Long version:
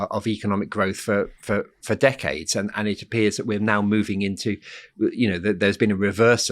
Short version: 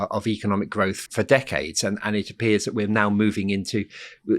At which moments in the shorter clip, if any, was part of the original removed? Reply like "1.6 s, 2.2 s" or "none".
1.0 s